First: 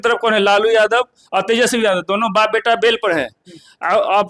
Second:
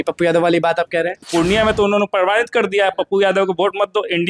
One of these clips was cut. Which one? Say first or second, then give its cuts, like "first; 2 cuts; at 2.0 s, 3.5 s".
second; 1 cut; at 1.2 s